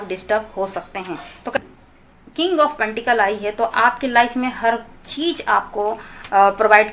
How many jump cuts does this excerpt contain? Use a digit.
1